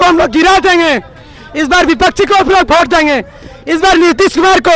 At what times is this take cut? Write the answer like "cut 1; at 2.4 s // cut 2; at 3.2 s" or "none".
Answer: none